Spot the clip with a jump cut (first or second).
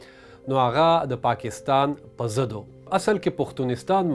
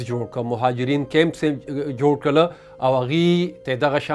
first